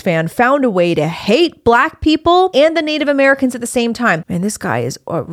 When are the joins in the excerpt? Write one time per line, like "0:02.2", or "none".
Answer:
0:02.5
0:04.3